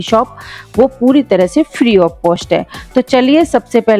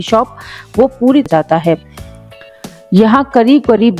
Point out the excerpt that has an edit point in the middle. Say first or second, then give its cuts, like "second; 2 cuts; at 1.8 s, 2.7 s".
second; 1 cut; at 1.3 s